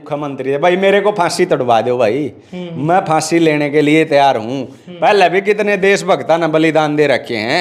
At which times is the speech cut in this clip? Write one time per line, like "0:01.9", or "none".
none